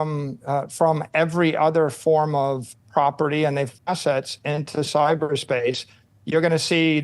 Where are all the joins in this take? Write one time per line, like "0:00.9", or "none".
0:03.8